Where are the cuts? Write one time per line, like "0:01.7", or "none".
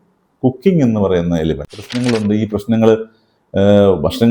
0:01.8